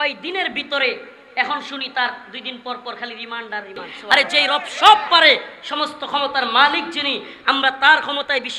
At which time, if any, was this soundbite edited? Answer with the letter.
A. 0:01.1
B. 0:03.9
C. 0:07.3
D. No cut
B